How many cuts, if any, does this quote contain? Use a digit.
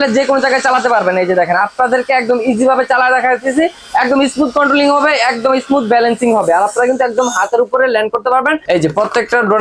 1